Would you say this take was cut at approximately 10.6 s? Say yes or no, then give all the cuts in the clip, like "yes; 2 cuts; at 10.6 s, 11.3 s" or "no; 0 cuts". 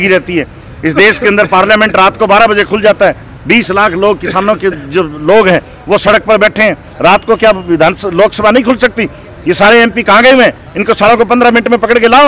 no; 0 cuts